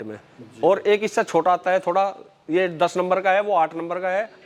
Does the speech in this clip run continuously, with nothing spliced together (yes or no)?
yes